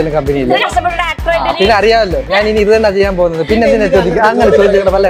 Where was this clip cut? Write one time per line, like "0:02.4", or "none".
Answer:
none